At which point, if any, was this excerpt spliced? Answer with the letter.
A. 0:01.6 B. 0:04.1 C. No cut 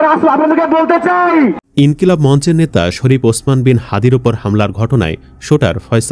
A